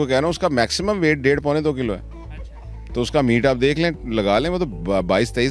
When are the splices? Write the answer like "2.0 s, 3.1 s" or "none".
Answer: none